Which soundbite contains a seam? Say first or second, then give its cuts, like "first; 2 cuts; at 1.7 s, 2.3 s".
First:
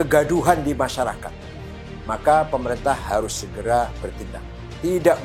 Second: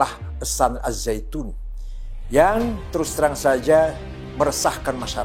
first; 1 cut; at 1.7 s